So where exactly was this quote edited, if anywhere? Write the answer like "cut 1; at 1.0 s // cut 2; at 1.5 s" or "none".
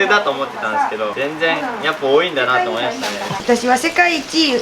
cut 1; at 1.1 s // cut 2; at 3.4 s